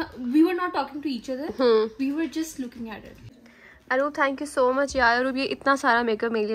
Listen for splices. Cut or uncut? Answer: cut